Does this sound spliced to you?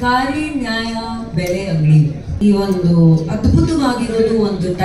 yes; 1 cut; at 2.3 s

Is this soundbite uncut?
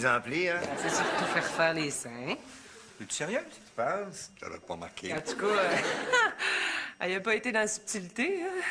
yes; 0 cuts

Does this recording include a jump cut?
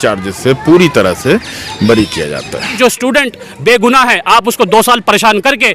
yes; 1 cut; at 2.8 s

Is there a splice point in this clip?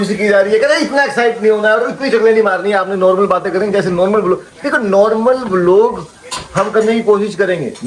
no; 0 cuts

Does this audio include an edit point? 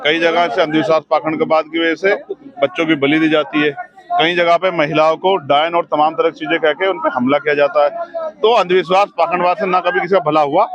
no; 0 cuts

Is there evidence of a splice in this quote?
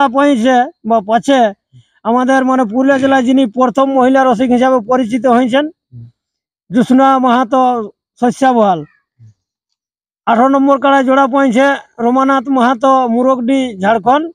no; 0 cuts

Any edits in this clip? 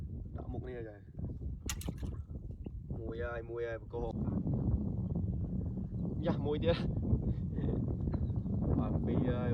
yes; 1 cut; at 4.1 s

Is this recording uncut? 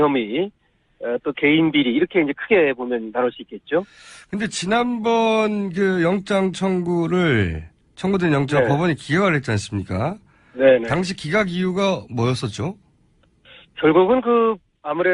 no; 1 cut; at 3.8 s

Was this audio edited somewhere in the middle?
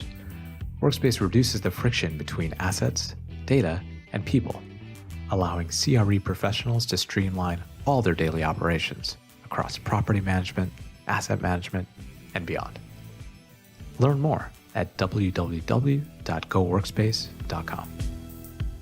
yes; 1 cut; at 17.8 s

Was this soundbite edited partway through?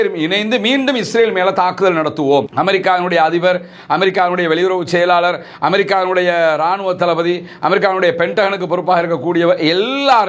yes; 1 cut; at 2.5 s

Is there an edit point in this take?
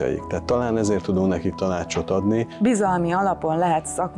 yes; 1 cut; at 2.5 s

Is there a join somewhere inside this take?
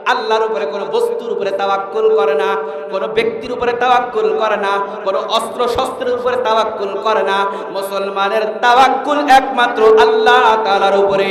no; 0 cuts

